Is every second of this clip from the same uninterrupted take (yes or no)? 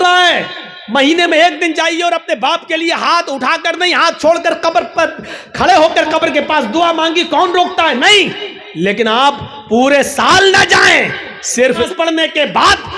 no